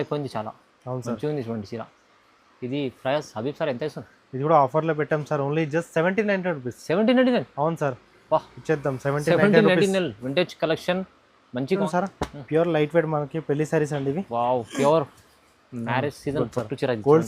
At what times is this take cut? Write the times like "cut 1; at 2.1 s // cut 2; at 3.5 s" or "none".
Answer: cut 1; at 11.8 s